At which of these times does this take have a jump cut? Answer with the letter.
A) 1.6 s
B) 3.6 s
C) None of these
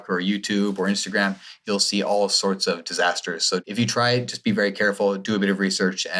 B